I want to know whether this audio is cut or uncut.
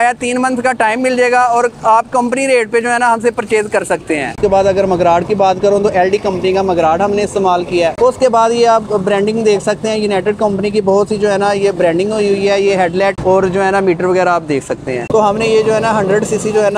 cut